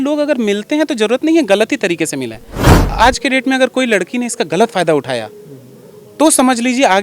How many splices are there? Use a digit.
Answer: 1